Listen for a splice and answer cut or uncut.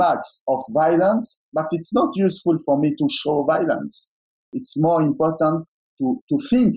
cut